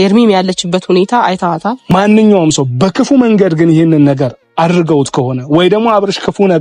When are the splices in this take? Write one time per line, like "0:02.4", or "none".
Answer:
0:01.9